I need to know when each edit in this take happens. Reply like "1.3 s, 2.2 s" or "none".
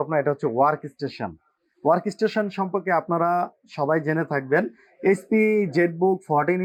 none